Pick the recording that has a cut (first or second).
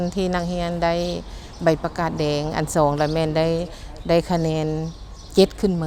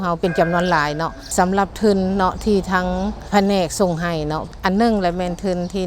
second